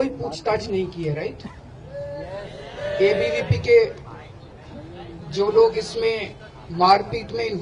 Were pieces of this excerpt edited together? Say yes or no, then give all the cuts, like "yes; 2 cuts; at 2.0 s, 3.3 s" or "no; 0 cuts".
yes; 1 cut; at 2.4 s